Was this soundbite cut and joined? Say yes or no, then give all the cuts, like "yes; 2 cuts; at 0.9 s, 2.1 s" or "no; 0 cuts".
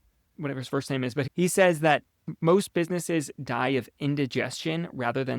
yes; 1 cut; at 2.3 s